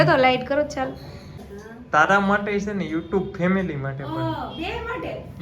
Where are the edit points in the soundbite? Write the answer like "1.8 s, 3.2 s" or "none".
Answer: 1.5 s